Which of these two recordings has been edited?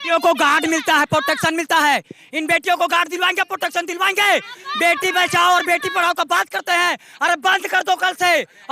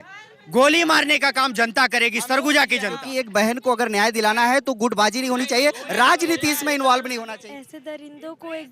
second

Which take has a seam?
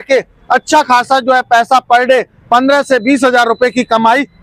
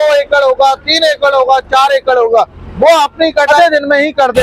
second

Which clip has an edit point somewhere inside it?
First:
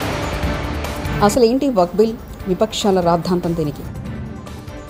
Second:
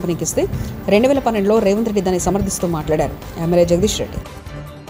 first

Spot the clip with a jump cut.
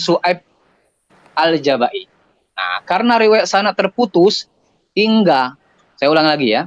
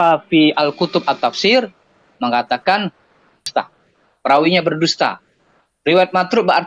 second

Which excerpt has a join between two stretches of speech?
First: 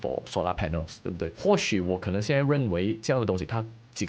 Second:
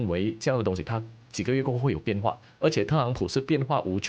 first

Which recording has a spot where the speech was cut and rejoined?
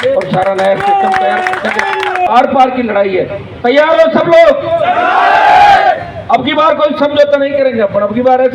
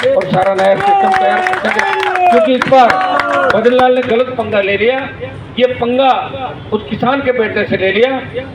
first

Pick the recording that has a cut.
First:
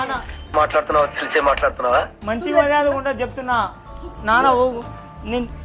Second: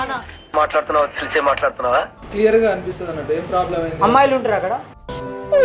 second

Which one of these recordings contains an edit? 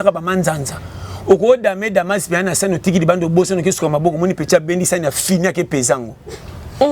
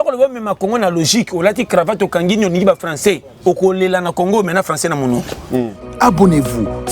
second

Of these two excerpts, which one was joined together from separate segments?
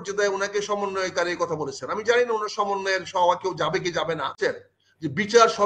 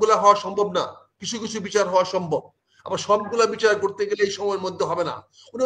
first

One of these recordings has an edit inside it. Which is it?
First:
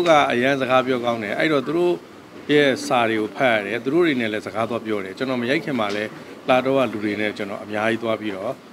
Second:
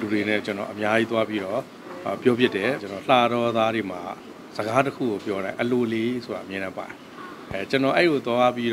second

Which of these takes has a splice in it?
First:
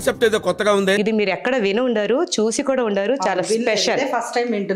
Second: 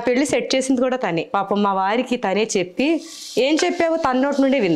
second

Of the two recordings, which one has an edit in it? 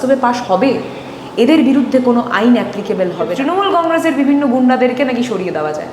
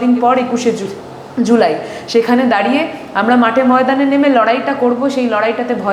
first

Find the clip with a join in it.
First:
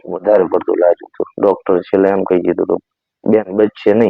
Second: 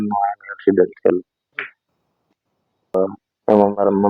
second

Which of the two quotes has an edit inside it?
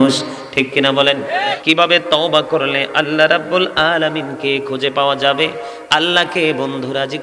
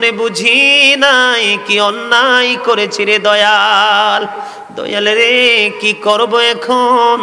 first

